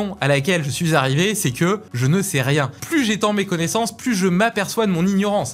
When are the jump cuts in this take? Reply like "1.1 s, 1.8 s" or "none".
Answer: 1.9 s, 2.8 s